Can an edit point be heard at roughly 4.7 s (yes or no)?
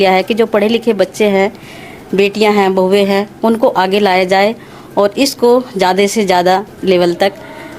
no